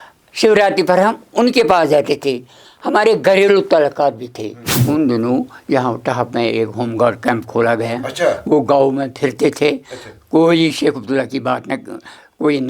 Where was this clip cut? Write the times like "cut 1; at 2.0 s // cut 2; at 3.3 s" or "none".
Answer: cut 1; at 4.7 s